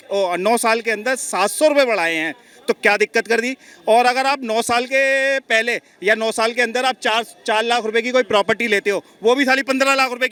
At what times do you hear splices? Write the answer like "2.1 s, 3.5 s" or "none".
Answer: none